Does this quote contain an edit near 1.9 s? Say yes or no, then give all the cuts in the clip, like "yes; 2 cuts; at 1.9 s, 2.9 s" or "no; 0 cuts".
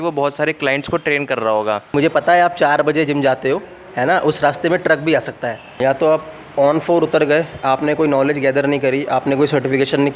yes; 2 cuts; at 1.9 s, 5.8 s